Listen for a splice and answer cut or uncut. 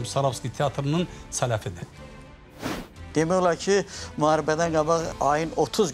cut